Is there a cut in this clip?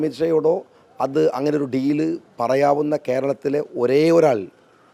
no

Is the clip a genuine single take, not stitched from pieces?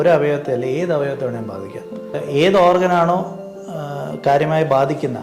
no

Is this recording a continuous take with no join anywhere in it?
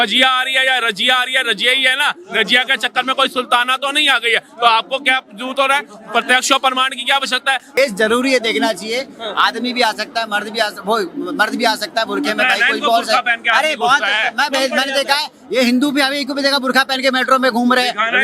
no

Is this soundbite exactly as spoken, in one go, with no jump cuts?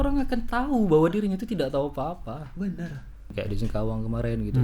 no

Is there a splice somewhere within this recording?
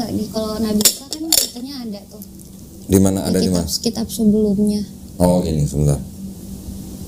no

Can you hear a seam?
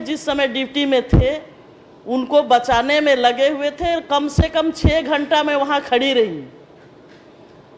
no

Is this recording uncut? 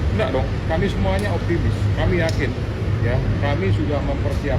yes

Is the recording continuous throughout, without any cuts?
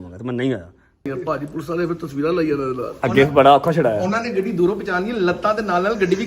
no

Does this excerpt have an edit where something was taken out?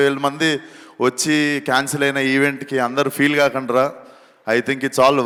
no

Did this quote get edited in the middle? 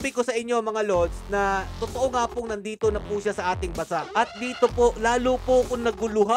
no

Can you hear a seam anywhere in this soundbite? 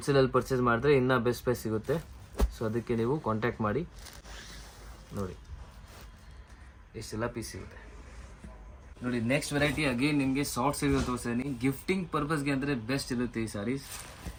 no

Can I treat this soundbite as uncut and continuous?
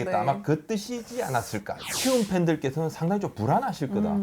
no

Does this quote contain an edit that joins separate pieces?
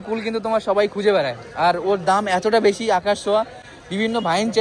no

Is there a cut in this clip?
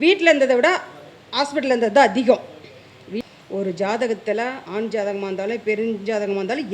yes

